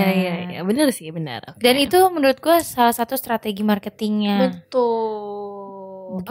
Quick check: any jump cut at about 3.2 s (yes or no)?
no